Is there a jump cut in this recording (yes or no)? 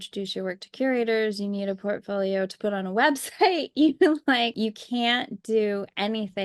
yes